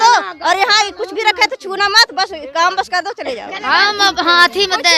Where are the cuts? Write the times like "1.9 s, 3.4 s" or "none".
3.5 s